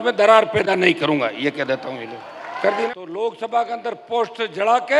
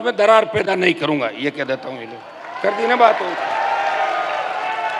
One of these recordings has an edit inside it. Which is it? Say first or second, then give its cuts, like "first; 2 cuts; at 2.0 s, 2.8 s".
first; 1 cut; at 2.9 s